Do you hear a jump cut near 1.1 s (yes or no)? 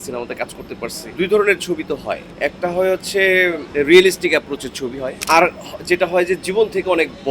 yes